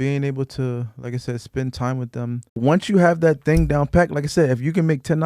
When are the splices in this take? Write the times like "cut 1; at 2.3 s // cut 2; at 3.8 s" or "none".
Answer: cut 1; at 2.6 s